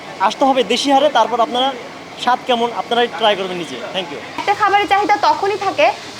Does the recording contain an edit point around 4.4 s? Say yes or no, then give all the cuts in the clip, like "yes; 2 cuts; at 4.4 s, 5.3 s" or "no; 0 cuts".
yes; 1 cut; at 4.4 s